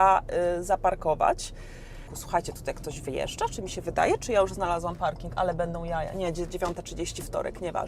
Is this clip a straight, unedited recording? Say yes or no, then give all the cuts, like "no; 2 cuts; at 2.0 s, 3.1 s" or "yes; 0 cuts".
no; 1 cut; at 2.1 s